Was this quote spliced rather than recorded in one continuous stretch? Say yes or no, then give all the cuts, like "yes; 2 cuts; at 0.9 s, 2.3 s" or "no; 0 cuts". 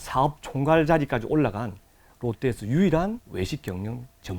yes; 1 cut; at 3.3 s